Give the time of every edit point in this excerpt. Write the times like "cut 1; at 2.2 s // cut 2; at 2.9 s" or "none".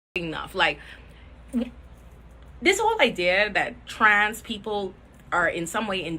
none